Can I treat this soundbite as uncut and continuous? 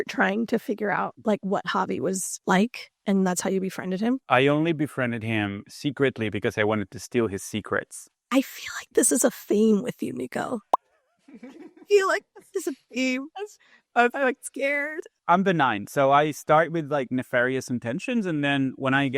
no; 2 cuts; at 4.2 s, 15.1 s

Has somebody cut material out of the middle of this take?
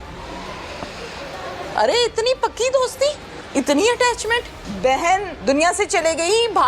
yes; 4 cuts; at 1.6 s, 3.3 s, 4.6 s, 5.3 s

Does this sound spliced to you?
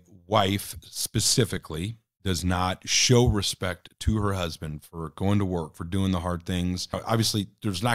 yes; 2 cuts; at 2.0 s, 7.0 s

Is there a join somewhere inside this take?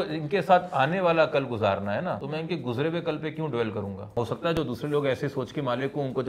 yes; 2 cuts; at 2.2 s, 4.2 s

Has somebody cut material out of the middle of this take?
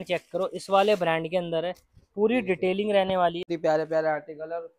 yes; 1 cut; at 3.5 s

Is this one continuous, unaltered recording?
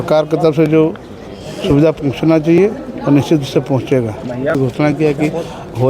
no; 1 cut; at 4.6 s

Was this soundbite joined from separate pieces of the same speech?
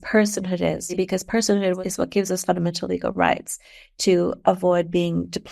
yes; 2 cuts; at 0.9 s, 1.8 s

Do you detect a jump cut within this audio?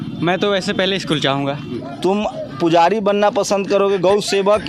yes; 1 cut; at 1.7 s

